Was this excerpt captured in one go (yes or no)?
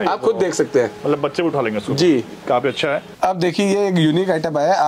no